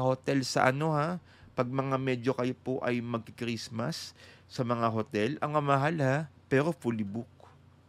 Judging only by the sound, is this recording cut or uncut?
uncut